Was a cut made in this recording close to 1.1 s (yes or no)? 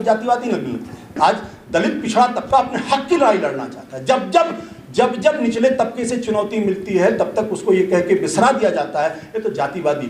yes